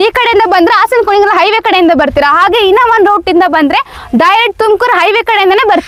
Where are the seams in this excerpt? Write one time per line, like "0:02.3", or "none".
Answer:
none